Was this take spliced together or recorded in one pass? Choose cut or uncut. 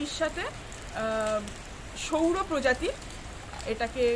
uncut